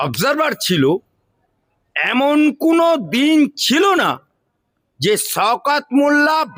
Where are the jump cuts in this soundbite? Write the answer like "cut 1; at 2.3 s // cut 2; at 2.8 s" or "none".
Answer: none